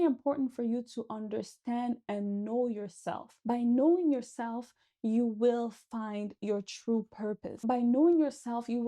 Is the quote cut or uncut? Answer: cut